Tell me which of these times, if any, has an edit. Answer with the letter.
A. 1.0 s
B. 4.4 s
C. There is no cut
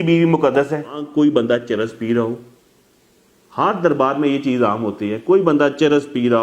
A